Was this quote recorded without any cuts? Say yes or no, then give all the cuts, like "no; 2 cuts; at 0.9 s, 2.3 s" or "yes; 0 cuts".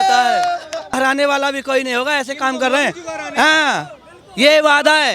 no; 1 cut; at 1.0 s